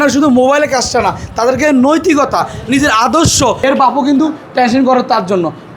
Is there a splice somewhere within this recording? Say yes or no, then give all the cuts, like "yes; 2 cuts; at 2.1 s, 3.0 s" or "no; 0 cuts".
yes; 1 cut; at 3.6 s